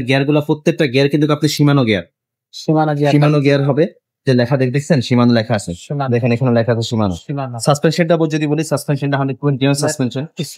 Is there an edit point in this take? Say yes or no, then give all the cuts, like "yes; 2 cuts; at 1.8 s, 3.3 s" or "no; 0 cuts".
no; 0 cuts